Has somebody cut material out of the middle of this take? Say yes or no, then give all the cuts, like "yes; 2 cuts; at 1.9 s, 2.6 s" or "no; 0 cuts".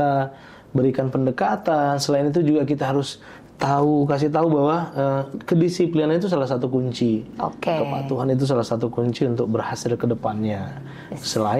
no; 0 cuts